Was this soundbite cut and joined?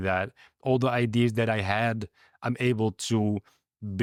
no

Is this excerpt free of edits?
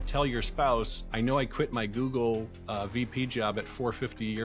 no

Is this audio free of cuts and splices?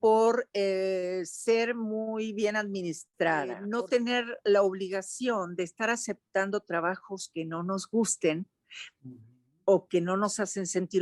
no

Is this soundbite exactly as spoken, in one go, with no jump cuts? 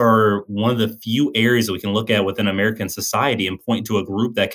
yes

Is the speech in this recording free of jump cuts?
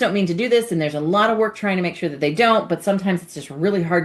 yes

